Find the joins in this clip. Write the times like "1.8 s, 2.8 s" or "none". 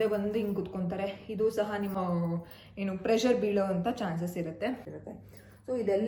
1.9 s, 4.9 s